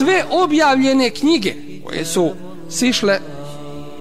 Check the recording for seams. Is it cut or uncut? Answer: uncut